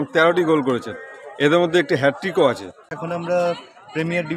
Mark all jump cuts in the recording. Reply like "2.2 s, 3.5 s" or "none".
3.1 s